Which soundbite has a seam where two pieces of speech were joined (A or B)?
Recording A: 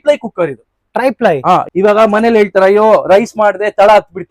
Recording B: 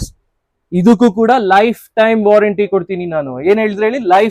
A